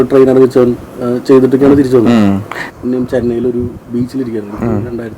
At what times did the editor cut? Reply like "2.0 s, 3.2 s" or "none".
2.7 s